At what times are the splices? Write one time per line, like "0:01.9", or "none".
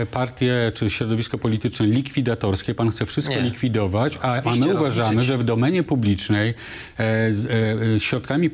none

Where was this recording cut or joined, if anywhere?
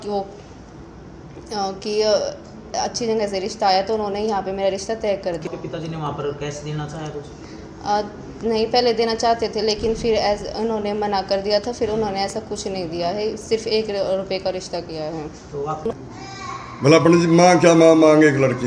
0:05.4
0:15.9

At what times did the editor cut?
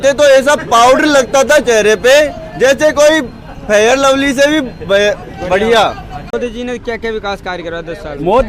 0:06.2

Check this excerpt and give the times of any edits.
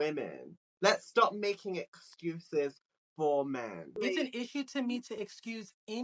0:03.9

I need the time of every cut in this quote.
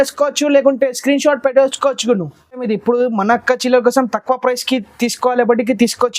0:02.6

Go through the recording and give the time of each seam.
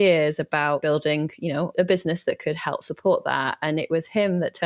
0:00.8
0:01.7

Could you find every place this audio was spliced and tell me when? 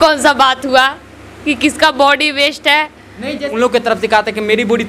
0:03.5

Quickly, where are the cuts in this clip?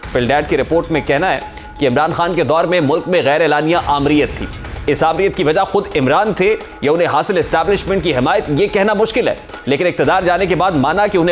0:09.5

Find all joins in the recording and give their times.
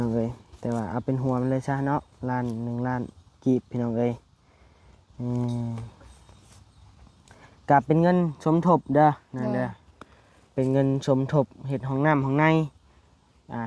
none

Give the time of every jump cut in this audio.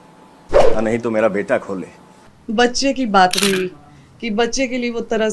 0:02.3

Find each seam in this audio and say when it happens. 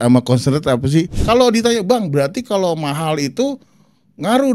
0:01.2

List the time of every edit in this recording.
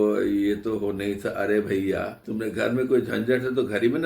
0:02.2

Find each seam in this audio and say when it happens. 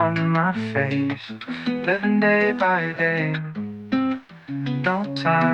none

